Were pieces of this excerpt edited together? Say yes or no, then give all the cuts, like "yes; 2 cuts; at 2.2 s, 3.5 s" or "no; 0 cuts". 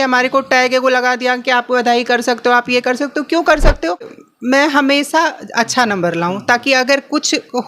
yes; 1 cut; at 4.2 s